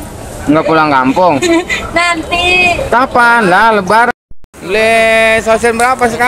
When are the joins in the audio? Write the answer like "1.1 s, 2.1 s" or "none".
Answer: 4.1 s